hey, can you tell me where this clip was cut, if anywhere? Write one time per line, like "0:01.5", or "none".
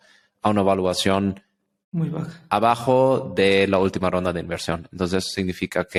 none